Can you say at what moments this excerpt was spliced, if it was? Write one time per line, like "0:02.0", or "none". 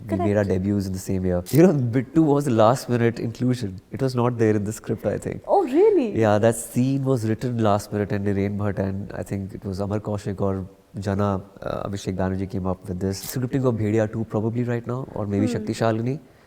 0:01.5
0:13.2